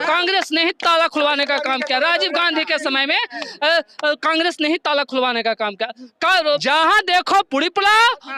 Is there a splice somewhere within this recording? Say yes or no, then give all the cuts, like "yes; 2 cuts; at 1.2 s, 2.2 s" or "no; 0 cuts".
yes; 1 cut; at 6.6 s